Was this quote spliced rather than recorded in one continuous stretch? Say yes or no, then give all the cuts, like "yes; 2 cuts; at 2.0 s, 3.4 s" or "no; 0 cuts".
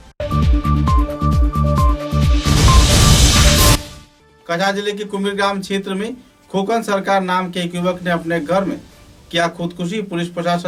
no; 0 cuts